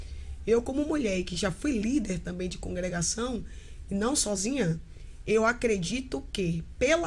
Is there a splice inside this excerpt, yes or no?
no